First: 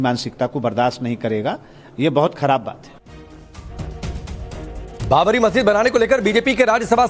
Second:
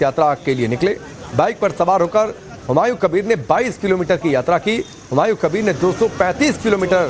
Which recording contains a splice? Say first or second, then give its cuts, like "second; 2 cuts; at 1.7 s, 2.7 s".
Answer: second; 1 cut; at 5.0 s